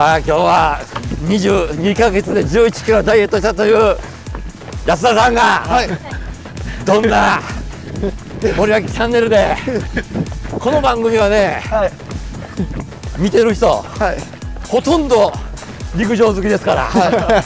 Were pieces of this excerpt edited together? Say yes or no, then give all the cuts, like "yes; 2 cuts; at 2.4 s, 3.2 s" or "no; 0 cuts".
no; 0 cuts